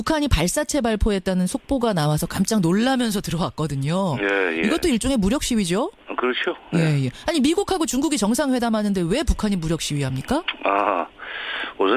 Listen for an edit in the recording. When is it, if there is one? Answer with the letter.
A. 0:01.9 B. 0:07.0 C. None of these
A